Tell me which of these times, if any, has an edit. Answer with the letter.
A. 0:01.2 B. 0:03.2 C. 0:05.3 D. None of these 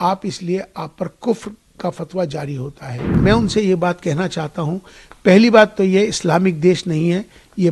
B